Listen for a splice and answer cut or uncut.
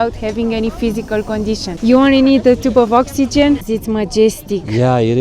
cut